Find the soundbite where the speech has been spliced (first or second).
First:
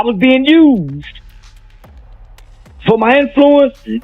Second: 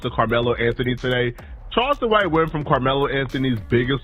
first